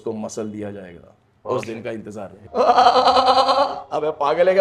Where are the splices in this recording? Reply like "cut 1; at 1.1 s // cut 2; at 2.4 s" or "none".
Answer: cut 1; at 2.3 s